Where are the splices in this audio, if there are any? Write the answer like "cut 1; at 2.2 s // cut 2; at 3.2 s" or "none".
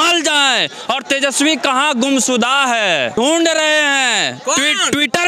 cut 1; at 3.2 s